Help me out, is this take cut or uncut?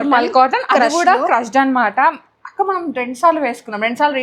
uncut